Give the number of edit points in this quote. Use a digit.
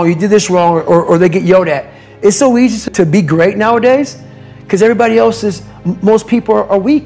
1